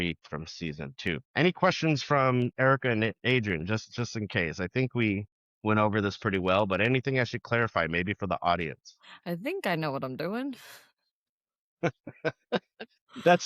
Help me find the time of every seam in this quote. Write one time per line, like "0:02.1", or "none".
0:01.3